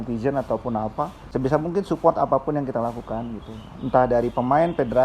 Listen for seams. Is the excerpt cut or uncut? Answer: cut